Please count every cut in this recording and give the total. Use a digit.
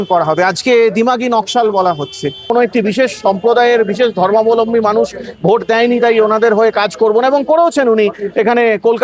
1